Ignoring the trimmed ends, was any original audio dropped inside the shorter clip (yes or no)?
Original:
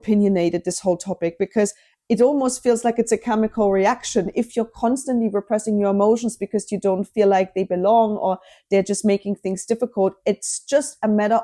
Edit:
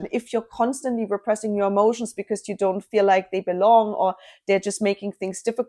no